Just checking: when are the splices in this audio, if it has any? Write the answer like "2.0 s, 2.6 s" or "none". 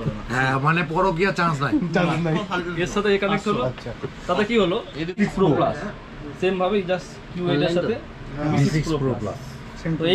5.0 s